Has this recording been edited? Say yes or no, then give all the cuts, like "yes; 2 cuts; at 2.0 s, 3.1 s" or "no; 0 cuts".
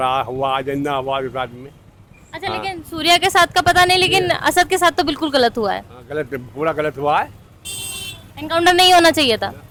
no; 0 cuts